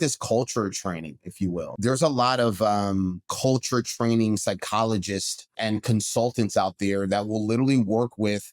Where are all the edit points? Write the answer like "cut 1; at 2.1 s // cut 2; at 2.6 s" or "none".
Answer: cut 1; at 1.7 s // cut 2; at 3.2 s // cut 3; at 5.5 s

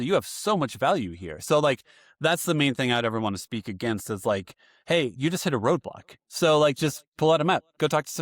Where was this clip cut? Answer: none

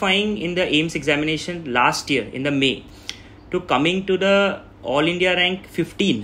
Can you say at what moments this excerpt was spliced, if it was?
none

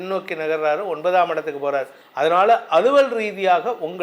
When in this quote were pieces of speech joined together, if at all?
cut 1; at 2.0 s

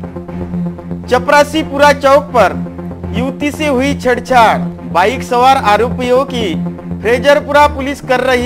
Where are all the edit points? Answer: cut 1; at 0.9 s

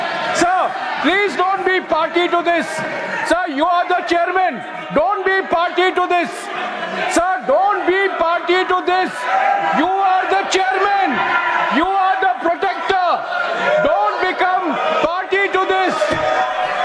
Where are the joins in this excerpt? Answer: none

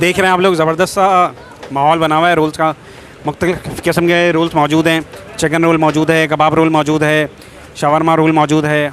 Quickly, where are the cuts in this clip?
none

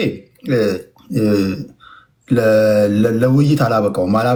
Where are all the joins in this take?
none

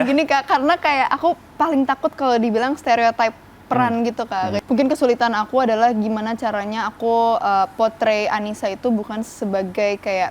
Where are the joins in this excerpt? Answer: cut 1; at 4.6 s

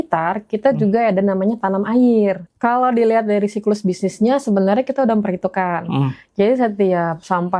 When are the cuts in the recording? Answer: cut 1; at 2.4 s

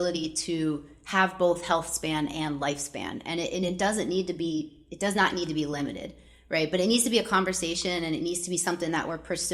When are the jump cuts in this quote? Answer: none

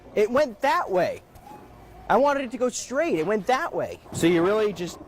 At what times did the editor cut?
cut 1; at 4.1 s

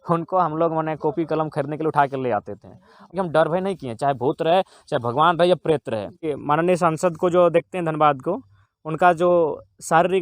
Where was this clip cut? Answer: cut 1; at 3.1 s // cut 2; at 6.3 s

